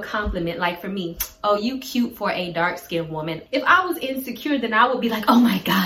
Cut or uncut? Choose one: cut